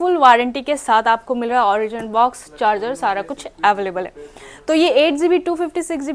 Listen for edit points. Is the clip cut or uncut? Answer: uncut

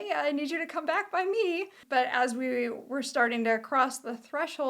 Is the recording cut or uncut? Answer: cut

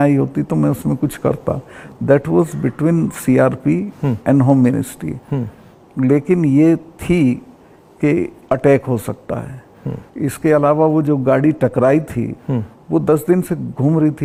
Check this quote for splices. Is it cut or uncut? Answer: uncut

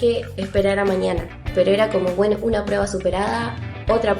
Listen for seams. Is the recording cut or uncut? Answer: cut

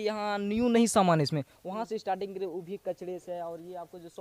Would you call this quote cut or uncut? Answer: uncut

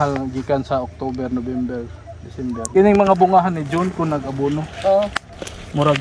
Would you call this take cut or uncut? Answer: cut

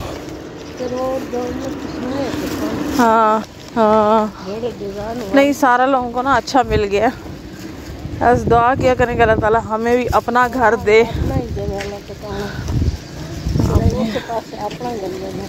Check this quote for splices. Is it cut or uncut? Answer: uncut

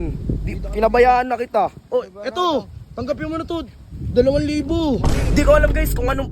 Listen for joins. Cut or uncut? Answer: cut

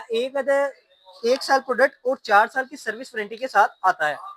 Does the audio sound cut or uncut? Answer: uncut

